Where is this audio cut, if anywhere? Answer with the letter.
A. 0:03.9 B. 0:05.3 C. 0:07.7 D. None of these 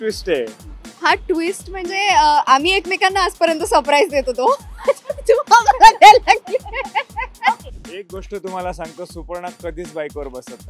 C